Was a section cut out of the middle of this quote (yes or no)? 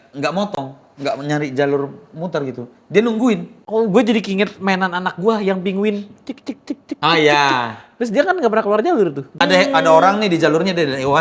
yes